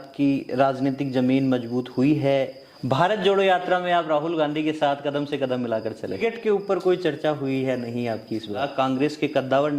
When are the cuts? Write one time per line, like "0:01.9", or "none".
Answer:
0:02.7
0:06.2
0:08.6